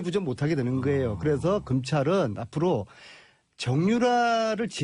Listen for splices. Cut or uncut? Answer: uncut